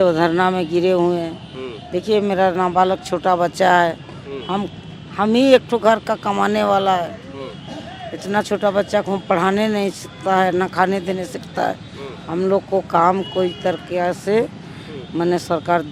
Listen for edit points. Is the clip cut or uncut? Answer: uncut